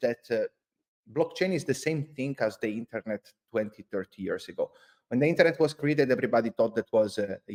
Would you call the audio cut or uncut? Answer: uncut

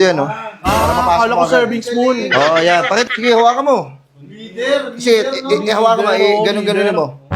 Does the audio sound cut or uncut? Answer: cut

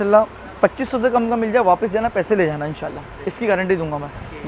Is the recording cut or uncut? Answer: uncut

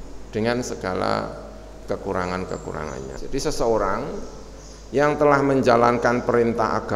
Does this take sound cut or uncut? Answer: cut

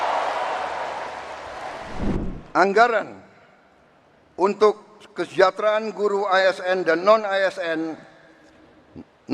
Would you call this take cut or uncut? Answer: cut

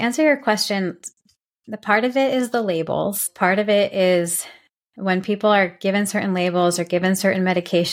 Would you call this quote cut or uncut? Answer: cut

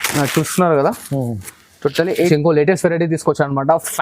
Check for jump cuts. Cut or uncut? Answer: cut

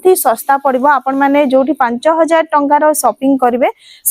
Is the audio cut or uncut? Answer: uncut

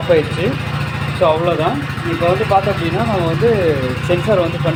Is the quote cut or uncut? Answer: uncut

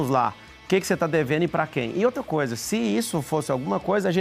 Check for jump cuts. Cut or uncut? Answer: uncut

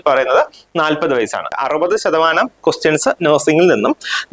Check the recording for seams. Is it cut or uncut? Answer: cut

